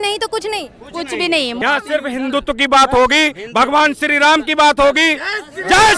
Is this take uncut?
no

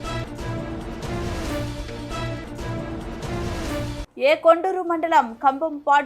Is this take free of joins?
no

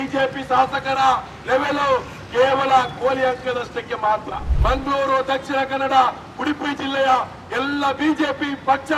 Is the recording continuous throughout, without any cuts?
no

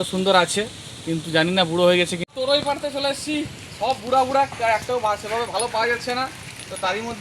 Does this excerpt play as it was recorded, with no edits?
no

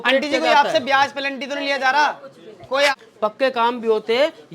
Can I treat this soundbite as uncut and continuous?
no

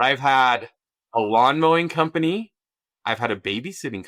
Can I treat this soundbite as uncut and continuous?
yes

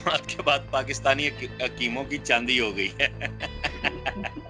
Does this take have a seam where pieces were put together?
no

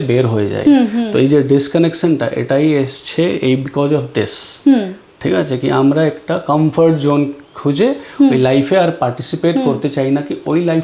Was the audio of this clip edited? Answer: no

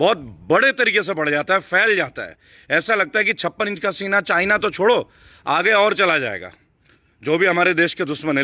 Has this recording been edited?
no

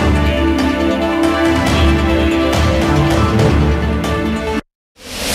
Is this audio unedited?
yes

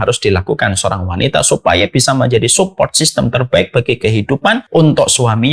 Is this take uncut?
no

